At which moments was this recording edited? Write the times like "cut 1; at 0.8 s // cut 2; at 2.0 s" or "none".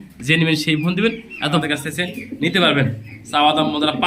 cut 1; at 1.6 s